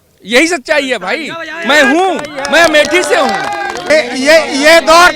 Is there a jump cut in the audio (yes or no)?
yes